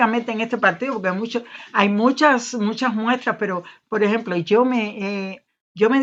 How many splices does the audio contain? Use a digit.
0